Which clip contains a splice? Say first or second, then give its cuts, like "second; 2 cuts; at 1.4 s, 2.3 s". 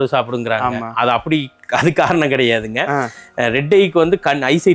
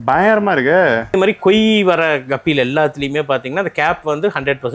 second; 1 cut; at 1.1 s